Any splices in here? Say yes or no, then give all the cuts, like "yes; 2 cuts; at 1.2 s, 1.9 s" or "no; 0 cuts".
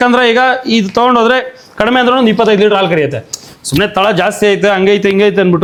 no; 0 cuts